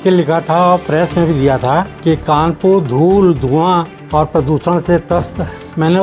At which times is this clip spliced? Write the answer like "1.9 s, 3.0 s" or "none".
none

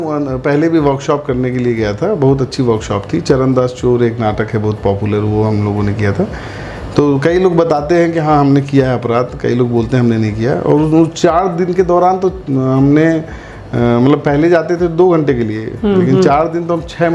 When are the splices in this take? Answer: none

